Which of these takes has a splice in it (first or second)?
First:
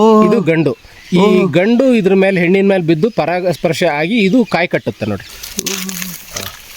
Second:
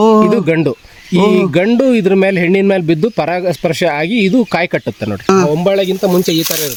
first